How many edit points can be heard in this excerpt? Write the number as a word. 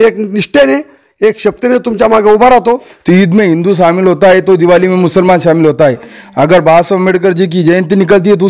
one